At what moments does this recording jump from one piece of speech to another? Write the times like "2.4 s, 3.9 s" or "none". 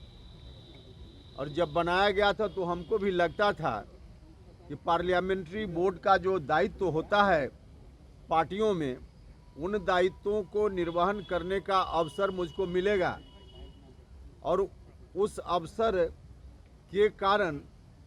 none